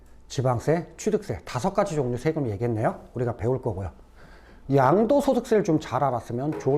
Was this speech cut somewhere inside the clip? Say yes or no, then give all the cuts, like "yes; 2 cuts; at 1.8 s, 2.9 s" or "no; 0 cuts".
yes; 1 cut; at 4.5 s